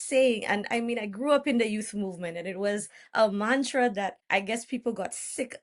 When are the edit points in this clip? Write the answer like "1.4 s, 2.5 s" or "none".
4.2 s